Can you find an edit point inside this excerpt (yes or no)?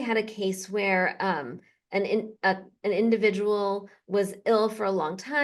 no